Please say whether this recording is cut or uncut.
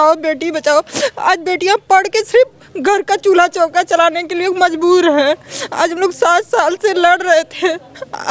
uncut